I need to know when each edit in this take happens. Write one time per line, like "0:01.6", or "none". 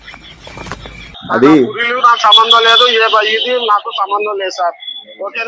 0:01.1